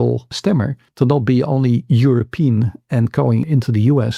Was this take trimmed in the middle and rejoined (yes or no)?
no